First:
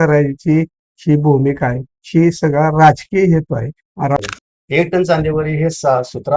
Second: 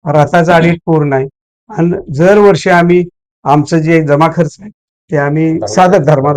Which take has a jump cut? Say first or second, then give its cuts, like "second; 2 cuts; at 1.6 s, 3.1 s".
first; 1 cut; at 4.2 s